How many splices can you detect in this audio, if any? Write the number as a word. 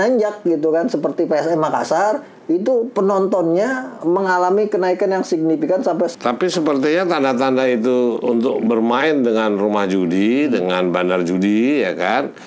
one